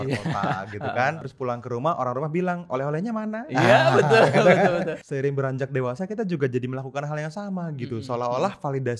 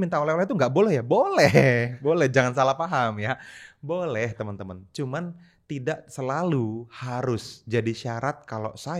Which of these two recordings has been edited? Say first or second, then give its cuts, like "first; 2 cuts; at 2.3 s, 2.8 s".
first; 2 cuts; at 1.3 s, 5.0 s